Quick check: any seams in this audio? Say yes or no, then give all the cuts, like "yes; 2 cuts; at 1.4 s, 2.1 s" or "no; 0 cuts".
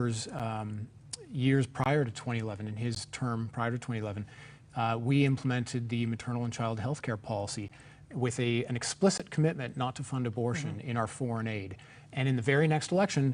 no; 0 cuts